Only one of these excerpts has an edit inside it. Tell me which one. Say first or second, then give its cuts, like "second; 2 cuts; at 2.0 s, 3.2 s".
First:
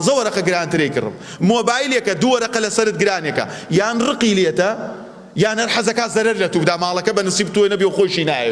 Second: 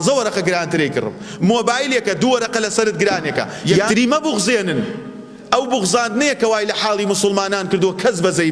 second; 1 cut; at 3.9 s